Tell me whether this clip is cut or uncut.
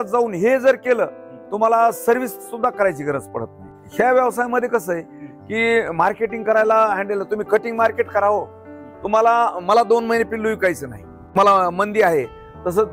cut